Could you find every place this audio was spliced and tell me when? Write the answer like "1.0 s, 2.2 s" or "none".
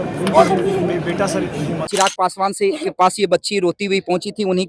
1.9 s